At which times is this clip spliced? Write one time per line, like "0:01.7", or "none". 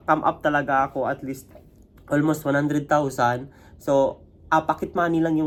none